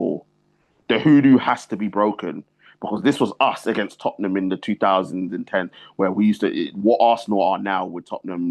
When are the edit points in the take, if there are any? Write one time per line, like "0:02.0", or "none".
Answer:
none